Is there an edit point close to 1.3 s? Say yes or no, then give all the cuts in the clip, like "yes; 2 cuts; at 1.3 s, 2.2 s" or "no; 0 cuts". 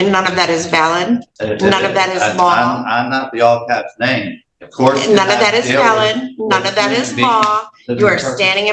yes; 1 cut; at 1.3 s